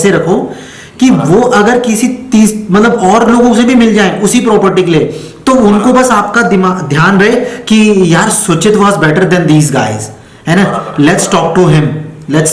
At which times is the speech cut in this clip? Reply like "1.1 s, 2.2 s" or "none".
none